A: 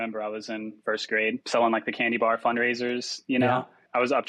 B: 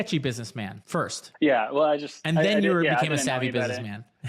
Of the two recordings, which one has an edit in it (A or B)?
B